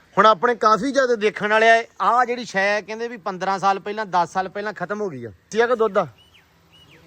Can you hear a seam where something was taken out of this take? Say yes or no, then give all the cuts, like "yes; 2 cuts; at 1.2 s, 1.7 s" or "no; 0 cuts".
yes; 1 cut; at 5.5 s